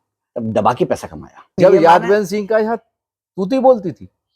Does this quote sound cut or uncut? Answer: cut